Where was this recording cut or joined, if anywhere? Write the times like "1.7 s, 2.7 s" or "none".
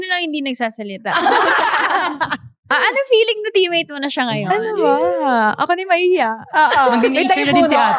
2.5 s